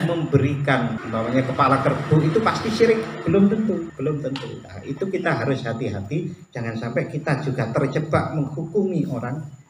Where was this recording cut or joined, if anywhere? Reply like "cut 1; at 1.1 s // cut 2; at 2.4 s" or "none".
cut 1; at 1.0 s // cut 2; at 3.9 s

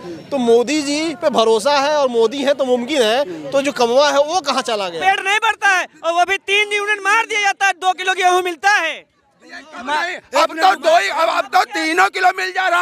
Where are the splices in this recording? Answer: cut 1; at 5.0 s

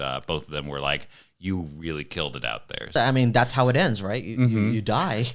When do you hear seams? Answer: cut 1; at 2.9 s

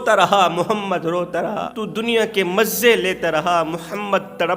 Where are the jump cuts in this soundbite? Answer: cut 1; at 1.7 s

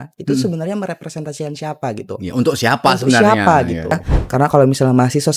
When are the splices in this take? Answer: cut 1; at 4.1 s

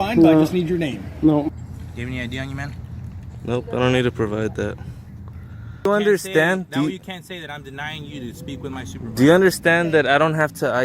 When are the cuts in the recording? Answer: cut 1; at 1.6 s // cut 2; at 5.9 s

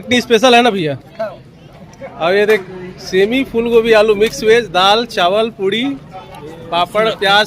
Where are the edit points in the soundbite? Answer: none

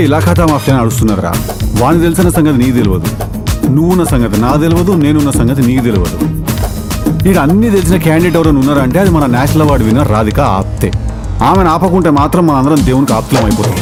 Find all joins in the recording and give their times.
none

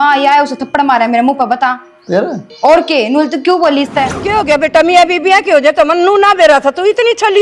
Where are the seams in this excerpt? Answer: cut 1; at 4.2 s

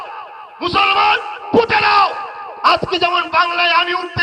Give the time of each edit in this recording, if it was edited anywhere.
none

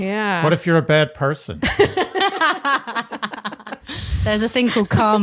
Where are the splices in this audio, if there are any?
cut 1; at 3.8 s

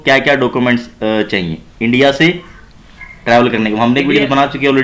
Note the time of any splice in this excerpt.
none

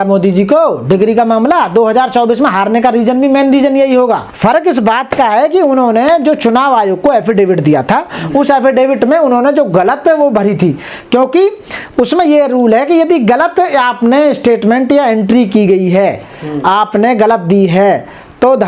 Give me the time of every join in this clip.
cut 1; at 4.3 s

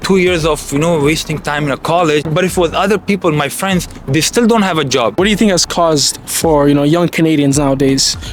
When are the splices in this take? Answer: cut 1; at 2.3 s // cut 2; at 5.2 s

